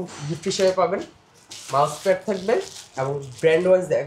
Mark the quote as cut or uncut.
uncut